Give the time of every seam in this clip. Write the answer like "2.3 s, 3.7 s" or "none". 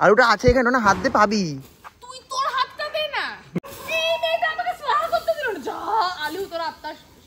3.8 s